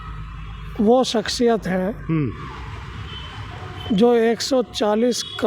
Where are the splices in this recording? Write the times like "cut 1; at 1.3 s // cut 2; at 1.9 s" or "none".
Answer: none